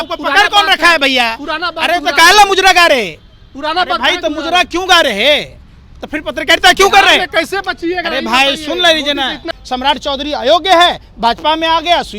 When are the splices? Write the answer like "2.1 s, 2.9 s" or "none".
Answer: 9.5 s